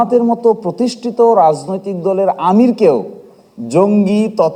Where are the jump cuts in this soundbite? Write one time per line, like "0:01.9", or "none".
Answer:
none